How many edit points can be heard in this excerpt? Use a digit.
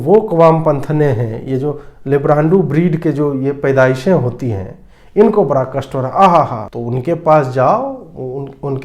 1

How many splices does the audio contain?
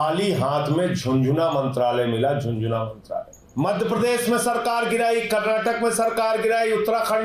1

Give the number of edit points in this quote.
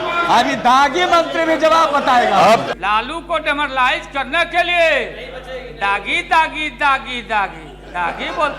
1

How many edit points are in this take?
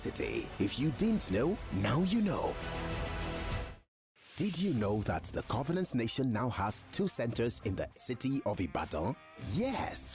1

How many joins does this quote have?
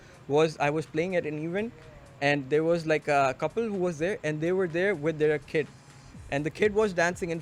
0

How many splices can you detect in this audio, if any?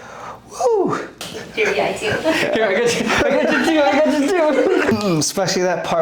2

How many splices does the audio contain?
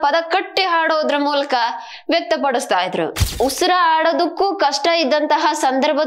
1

